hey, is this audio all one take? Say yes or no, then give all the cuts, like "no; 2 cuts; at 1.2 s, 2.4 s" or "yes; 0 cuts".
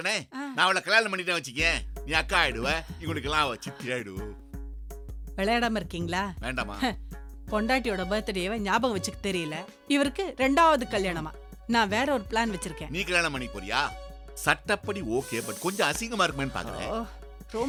yes; 0 cuts